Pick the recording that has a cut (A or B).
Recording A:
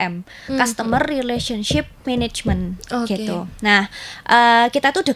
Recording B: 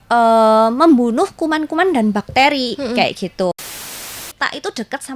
B